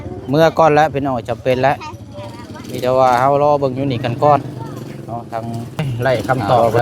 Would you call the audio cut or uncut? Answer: cut